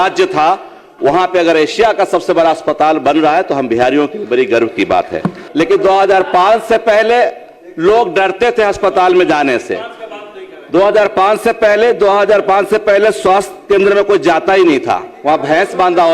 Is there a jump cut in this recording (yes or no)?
yes